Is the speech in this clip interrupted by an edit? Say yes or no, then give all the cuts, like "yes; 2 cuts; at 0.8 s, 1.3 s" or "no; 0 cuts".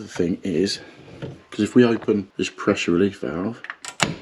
yes; 1 cut; at 2.3 s